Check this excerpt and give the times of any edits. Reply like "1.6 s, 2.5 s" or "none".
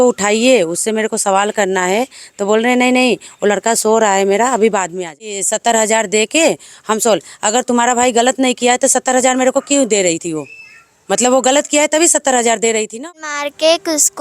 5.5 s, 13.0 s